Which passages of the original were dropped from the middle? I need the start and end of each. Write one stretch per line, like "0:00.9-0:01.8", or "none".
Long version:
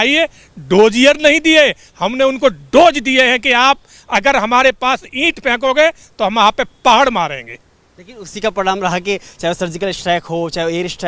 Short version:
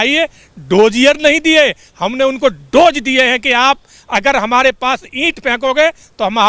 none